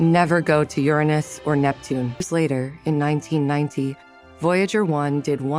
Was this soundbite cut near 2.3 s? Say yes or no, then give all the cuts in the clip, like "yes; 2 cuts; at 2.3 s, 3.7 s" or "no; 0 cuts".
yes; 1 cut; at 2.3 s